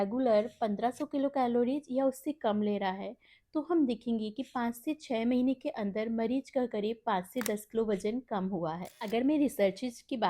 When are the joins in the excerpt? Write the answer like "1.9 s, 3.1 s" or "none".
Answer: 8.9 s

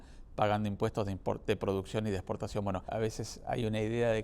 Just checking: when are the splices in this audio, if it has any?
2.9 s

